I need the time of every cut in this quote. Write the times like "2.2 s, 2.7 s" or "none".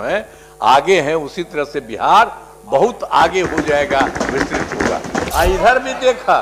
5.3 s